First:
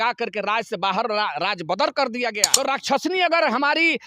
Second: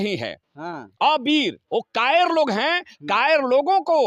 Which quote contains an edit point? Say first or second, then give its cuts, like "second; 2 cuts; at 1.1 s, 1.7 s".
first; 1 cut; at 2.5 s